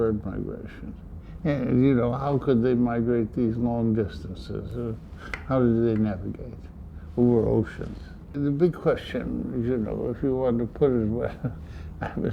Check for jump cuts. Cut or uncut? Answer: uncut